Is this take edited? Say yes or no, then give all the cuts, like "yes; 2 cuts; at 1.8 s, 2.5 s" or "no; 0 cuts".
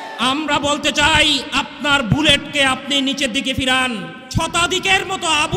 yes; 1 cut; at 4.2 s